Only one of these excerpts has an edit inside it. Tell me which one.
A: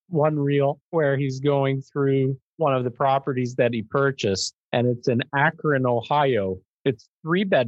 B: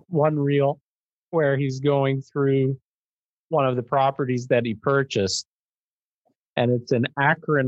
A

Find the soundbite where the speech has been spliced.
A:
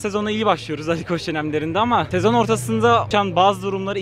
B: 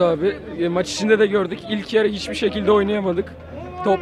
A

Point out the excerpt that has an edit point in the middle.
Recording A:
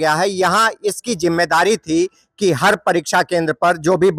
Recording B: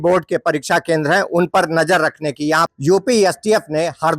B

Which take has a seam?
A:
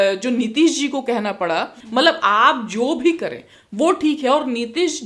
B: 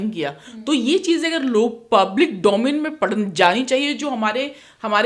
A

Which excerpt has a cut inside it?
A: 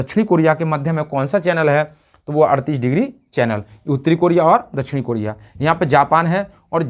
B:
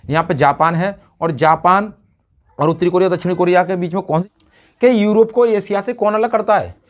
B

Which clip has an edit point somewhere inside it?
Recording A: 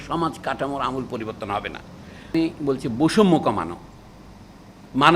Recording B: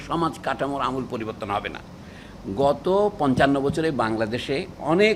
A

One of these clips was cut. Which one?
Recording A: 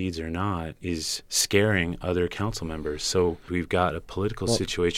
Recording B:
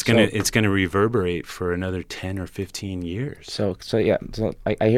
A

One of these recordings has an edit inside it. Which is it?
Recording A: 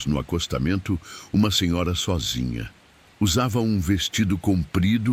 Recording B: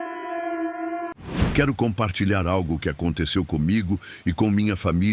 B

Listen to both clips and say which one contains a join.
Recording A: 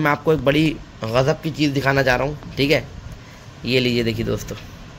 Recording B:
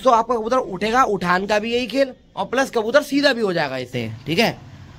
B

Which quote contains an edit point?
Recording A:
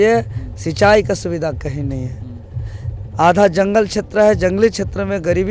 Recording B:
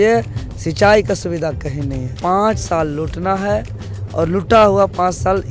B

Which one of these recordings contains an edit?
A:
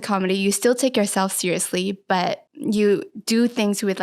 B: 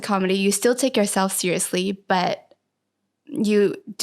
A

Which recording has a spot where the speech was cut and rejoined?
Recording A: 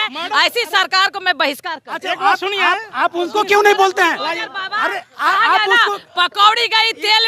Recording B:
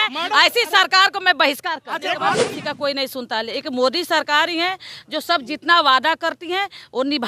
B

